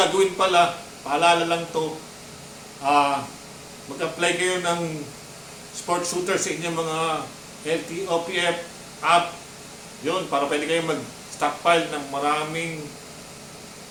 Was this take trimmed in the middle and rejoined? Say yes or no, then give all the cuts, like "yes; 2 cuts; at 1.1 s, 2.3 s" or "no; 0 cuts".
no; 0 cuts